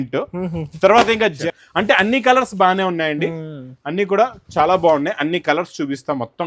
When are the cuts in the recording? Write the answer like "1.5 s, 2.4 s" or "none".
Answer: 1.4 s